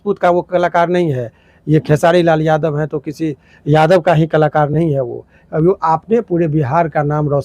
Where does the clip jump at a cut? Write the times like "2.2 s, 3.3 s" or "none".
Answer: none